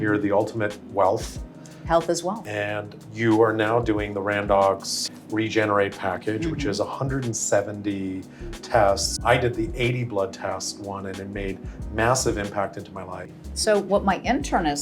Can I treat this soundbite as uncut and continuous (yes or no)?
no